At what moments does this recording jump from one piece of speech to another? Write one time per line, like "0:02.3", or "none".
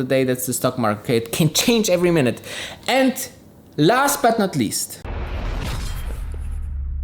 none